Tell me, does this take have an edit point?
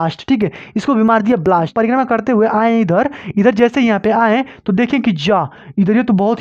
yes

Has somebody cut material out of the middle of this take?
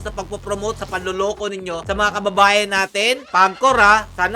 yes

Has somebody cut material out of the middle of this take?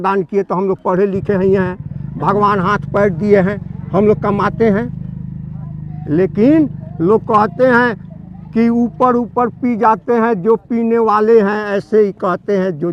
no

